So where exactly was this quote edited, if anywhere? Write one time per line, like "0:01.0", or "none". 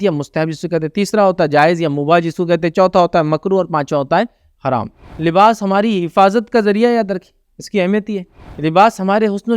0:05.1
0:08.5